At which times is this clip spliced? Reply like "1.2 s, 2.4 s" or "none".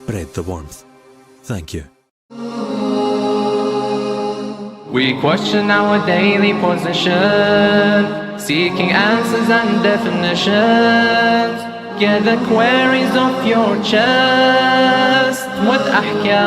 2.5 s